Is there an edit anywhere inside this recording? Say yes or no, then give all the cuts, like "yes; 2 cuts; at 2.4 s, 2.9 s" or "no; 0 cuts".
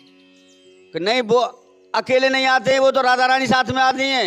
no; 0 cuts